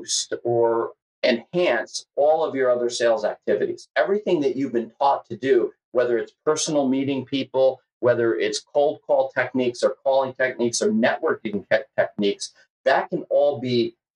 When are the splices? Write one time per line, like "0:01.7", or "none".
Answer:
0:00.9